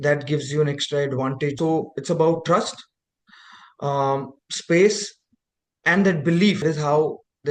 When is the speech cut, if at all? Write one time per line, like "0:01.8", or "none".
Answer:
0:01.6
0:06.6